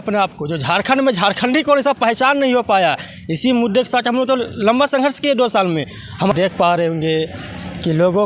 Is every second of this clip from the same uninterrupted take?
no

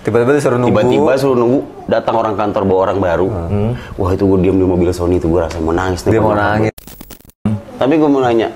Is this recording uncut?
no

